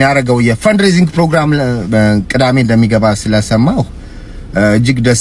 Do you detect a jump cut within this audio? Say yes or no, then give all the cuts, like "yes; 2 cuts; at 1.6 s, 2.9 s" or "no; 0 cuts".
no; 0 cuts